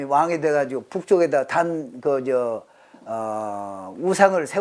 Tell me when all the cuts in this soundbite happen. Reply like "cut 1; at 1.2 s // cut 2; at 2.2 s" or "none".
none